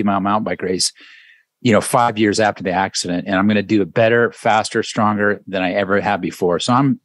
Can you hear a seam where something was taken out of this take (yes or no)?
no